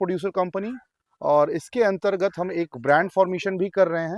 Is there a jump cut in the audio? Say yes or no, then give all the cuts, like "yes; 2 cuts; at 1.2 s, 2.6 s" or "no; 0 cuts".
no; 0 cuts